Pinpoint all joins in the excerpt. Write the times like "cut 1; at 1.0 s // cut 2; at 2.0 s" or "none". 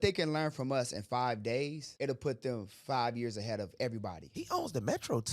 cut 1; at 4.3 s

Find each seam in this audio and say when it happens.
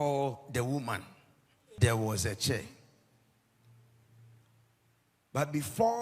cut 1; at 1.6 s

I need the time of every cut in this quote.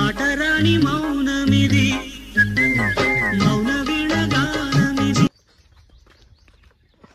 none

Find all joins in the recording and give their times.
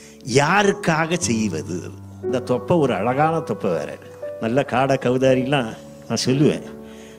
cut 1; at 2.3 s // cut 2; at 3.9 s

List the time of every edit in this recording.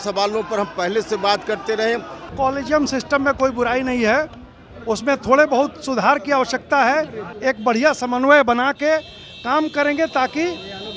cut 1; at 2.2 s // cut 2; at 7.3 s

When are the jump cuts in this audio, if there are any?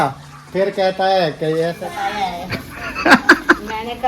cut 1; at 1.8 s

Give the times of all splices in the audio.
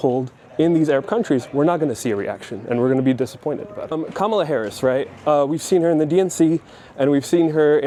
none

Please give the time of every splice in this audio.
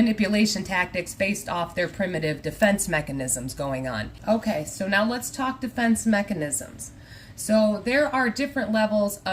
cut 1; at 4.1 s

